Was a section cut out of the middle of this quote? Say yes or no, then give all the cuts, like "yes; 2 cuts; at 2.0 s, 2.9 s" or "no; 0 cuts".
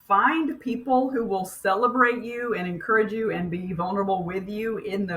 no; 0 cuts